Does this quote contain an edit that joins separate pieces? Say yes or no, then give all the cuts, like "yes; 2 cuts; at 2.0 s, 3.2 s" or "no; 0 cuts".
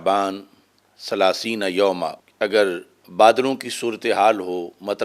yes; 2 cuts; at 2.2 s, 3.0 s